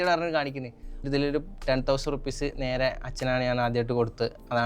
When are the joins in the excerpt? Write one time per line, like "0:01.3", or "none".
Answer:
0:01.1